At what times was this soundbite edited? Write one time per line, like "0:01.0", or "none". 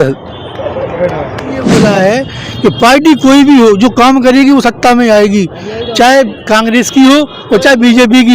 0:01.7

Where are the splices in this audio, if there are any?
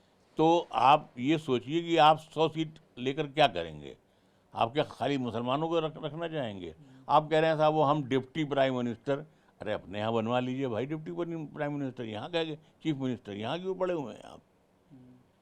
none

